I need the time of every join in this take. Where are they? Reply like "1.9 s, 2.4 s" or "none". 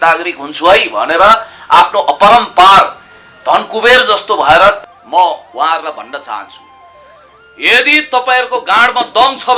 4.8 s